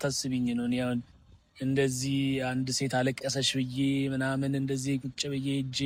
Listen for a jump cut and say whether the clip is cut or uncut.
uncut